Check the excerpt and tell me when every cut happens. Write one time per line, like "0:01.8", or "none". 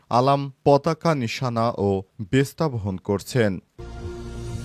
0:03.7